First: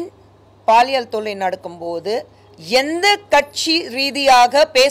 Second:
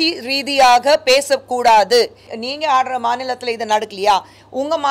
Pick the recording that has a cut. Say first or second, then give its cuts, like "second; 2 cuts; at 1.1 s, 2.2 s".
second; 1 cut; at 2.3 s